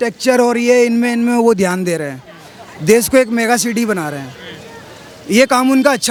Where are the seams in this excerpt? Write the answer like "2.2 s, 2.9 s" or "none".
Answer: none